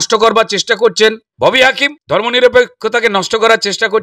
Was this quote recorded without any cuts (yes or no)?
no